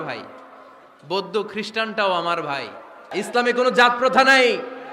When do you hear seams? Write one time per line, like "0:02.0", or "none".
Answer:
0:03.1